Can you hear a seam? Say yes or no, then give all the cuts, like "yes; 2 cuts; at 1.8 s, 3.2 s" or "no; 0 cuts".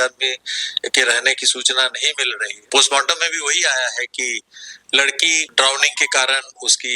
yes; 2 cuts; at 2.6 s, 5.4 s